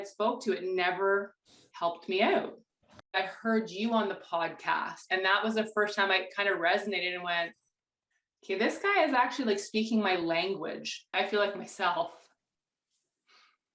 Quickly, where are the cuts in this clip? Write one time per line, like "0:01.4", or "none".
0:03.2
0:11.1